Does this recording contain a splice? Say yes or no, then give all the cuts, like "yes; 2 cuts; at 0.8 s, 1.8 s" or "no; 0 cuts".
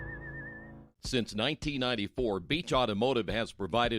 yes; 1 cut; at 1.1 s